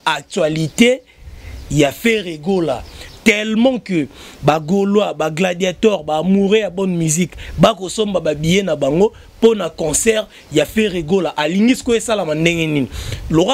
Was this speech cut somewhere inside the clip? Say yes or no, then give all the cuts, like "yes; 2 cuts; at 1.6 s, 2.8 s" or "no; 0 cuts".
no; 0 cuts